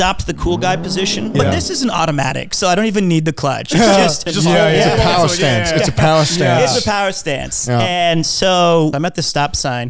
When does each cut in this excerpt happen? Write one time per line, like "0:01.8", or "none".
0:01.3
0:04.2
0:08.9

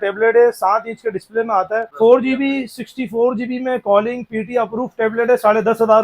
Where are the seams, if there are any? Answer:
0:01.9

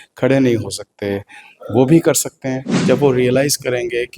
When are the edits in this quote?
0:02.7

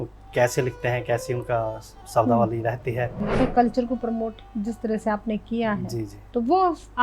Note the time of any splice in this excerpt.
0:03.2

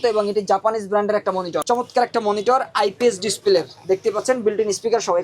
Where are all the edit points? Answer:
0:01.6

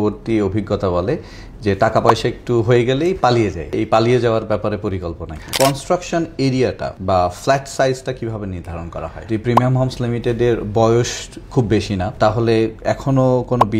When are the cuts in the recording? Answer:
0:03.8
0:05.5
0:06.9
0:09.2
0:12.1

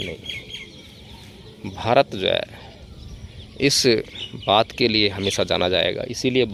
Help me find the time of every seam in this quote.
none

